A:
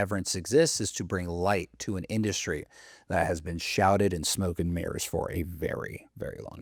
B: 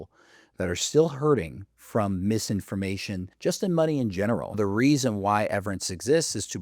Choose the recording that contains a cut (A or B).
B